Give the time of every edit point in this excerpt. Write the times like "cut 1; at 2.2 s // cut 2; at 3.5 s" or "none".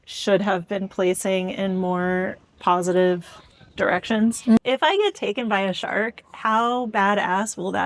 cut 1; at 4.6 s